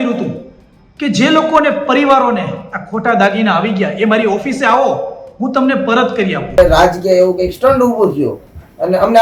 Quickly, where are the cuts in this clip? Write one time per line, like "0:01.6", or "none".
0:06.6